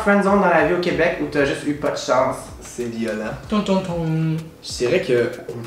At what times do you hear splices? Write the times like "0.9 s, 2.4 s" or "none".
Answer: none